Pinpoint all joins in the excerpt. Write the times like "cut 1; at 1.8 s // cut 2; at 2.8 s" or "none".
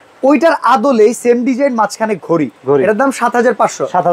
none

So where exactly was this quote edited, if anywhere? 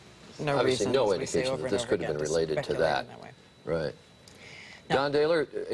cut 1; at 3.4 s

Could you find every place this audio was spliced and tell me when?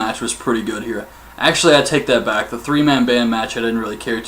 none

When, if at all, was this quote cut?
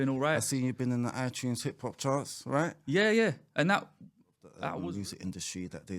cut 1; at 4.6 s

